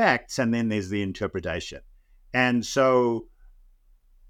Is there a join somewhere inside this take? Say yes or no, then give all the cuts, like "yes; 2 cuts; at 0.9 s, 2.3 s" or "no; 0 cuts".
no; 0 cuts